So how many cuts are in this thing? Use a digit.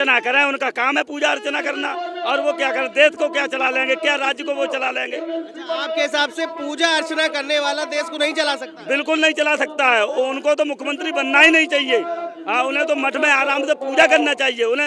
0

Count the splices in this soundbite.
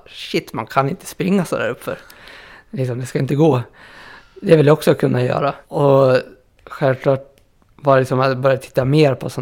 1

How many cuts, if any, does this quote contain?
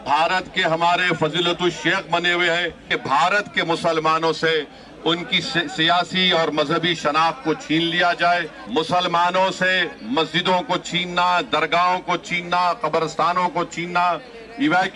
2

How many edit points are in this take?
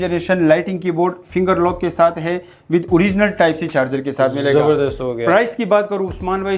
0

